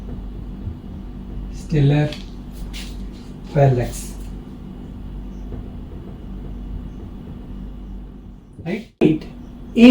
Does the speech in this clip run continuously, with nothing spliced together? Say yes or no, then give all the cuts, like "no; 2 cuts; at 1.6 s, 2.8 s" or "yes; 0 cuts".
no; 1 cut; at 9.0 s